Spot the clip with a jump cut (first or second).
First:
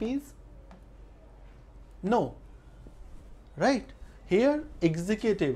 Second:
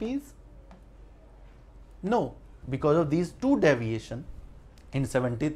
second